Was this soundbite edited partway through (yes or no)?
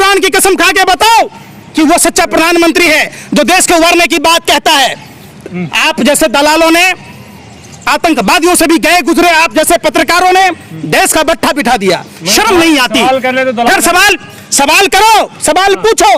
no